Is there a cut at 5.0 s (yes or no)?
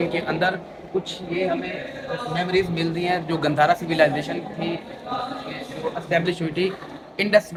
no